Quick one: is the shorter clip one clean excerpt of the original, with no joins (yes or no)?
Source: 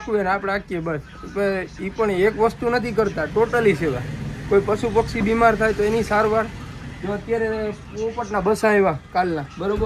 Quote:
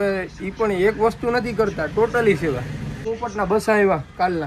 no